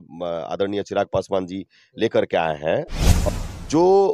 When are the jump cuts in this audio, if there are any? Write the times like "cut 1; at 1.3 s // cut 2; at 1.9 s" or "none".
cut 1; at 3.0 s